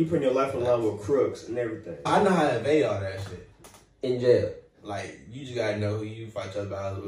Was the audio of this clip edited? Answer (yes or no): yes